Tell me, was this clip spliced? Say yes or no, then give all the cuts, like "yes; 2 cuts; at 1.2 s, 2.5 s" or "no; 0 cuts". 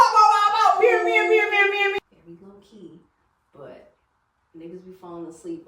yes; 1 cut; at 2.0 s